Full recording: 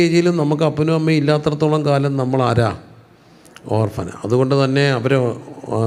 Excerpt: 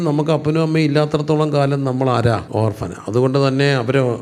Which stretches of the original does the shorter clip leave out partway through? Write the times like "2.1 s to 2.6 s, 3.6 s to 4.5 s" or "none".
2.8 s to 3.6 s